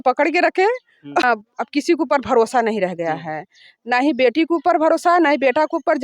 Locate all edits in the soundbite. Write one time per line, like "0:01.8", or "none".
0:01.2